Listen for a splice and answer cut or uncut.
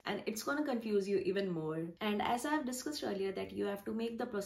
cut